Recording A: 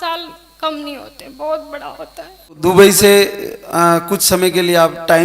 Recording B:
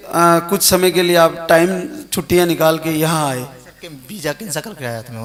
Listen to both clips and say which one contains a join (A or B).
A